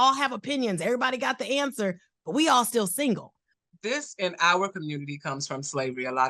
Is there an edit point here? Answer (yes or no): yes